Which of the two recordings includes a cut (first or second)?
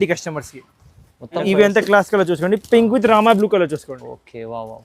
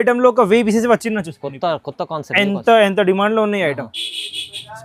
first